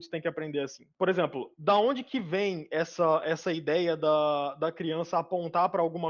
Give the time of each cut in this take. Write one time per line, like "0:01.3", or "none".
none